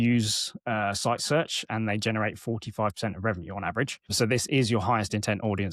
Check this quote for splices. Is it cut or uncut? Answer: uncut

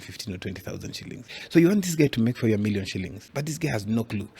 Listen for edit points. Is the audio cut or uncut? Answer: cut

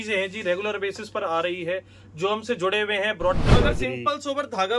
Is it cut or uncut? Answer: cut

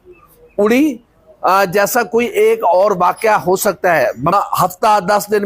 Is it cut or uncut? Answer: cut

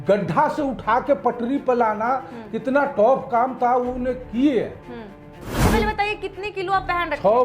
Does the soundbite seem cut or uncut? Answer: cut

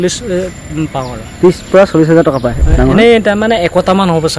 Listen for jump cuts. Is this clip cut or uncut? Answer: cut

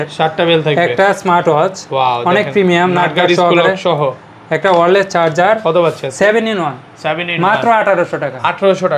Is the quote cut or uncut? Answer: uncut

